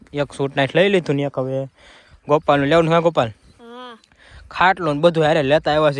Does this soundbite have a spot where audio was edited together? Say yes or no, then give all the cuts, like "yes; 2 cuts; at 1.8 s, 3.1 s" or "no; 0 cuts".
no; 0 cuts